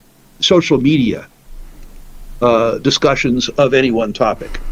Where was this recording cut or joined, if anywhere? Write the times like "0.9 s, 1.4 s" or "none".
none

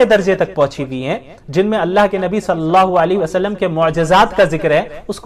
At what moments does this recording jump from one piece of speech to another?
none

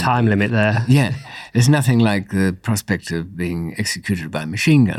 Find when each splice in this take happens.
none

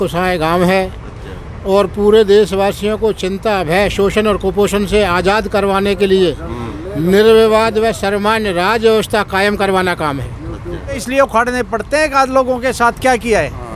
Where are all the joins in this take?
11.0 s

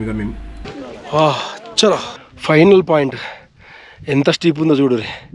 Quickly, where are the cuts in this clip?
2.1 s

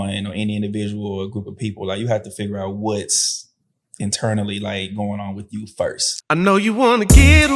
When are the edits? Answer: 6.1 s

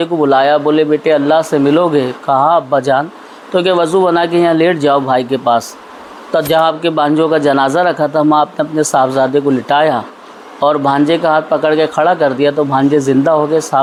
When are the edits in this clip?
none

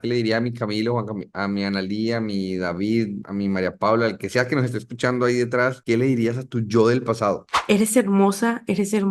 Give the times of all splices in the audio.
3.2 s, 5.8 s, 7.6 s

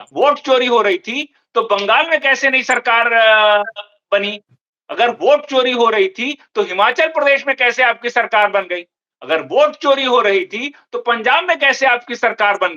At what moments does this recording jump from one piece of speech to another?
none

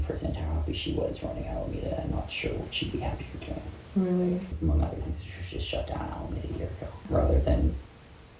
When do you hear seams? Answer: 4.5 s, 7.1 s

